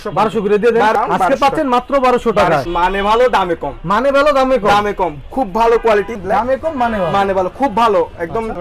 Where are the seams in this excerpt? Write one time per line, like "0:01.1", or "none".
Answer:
0:02.7
0:06.2

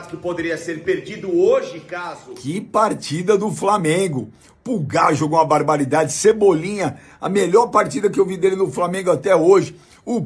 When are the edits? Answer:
0:01.9

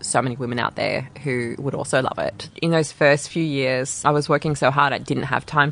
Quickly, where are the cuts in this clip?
0:02.5
0:03.9

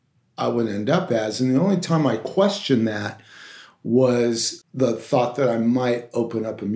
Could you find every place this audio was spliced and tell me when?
0:04.6

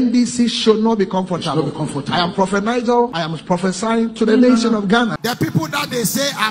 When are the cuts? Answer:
0:03.2
0:05.2

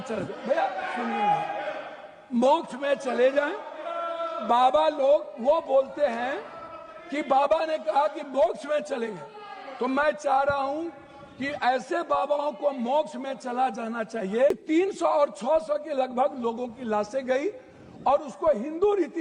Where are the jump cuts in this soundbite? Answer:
0:14.5

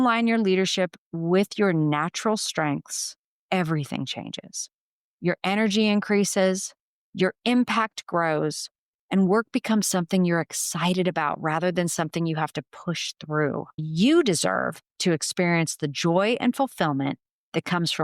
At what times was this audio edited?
0:13.9

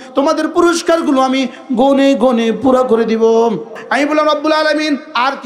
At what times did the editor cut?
0:03.8

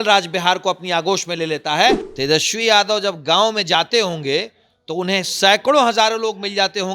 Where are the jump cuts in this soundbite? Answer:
0:02.1

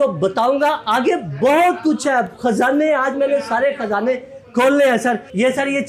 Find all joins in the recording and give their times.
none

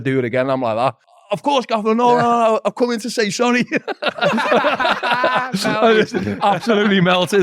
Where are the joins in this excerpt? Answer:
0:01.1

